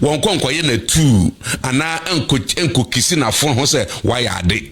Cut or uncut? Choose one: uncut